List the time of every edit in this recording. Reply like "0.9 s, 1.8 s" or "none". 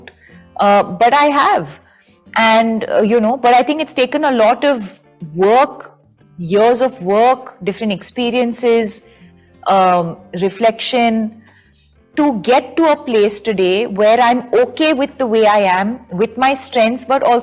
none